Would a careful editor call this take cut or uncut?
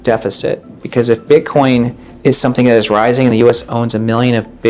cut